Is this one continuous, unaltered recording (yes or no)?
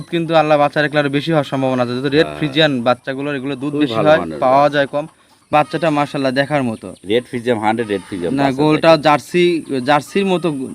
no